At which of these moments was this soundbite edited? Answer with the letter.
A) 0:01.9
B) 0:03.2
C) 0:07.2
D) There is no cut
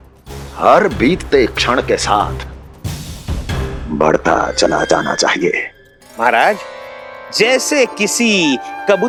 D